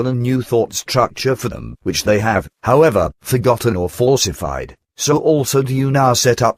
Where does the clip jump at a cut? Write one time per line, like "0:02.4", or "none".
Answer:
0:04.5